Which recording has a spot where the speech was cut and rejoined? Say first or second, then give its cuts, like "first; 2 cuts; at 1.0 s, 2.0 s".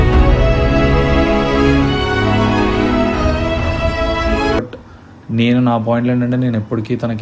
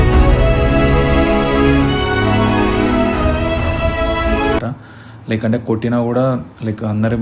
first; 1 cut; at 4.6 s